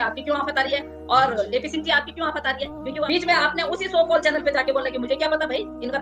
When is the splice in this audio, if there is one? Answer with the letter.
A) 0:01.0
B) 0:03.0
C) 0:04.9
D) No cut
B